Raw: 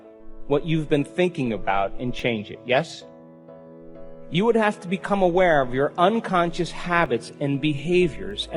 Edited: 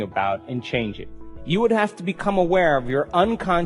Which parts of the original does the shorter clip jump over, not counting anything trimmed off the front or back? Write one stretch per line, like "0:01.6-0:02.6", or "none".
0:02.5-0:03.9